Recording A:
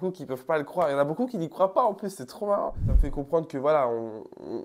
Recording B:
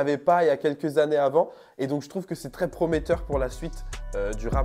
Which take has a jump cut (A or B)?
A